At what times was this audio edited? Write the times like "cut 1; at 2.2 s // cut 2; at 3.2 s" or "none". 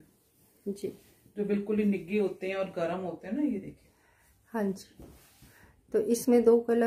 none